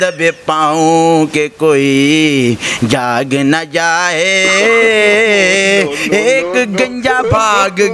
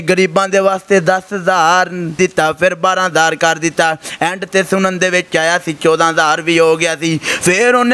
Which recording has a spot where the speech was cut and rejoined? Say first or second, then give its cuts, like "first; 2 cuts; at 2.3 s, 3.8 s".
second; 1 cut; at 2.2 s